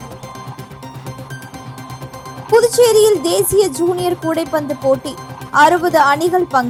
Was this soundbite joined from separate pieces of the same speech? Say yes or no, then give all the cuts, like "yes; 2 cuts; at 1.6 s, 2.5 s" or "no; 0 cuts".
no; 0 cuts